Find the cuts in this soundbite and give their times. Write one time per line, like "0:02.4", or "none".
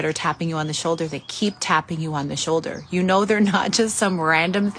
none